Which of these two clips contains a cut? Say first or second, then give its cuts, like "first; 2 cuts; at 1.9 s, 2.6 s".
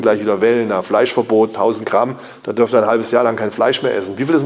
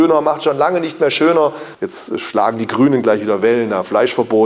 second; 1 cut; at 1.7 s